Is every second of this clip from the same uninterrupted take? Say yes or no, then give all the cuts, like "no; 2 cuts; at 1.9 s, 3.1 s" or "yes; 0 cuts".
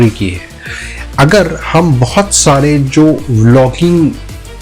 yes; 0 cuts